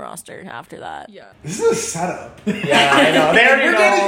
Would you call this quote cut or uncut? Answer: cut